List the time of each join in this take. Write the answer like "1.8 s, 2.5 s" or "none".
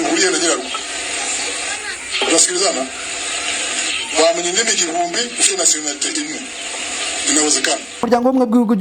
7.9 s